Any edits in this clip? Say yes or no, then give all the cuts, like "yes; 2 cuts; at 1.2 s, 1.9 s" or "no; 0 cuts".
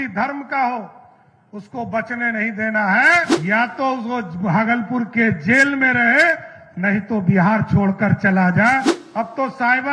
yes; 2 cuts; at 3.3 s, 9.0 s